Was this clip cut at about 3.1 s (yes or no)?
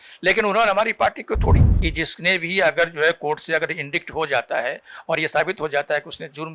no